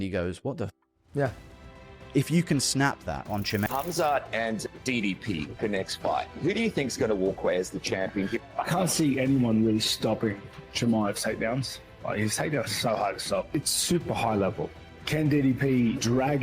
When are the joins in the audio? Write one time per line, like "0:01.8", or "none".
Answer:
0:03.7